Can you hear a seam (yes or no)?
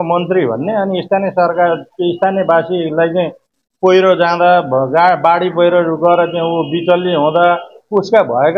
no